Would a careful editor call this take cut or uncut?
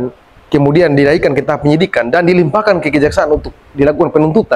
uncut